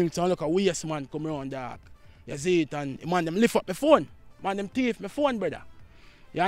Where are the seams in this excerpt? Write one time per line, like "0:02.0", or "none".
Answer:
none